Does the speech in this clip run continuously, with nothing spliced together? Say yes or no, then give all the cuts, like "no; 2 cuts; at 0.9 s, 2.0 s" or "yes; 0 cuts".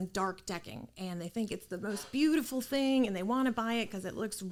yes; 0 cuts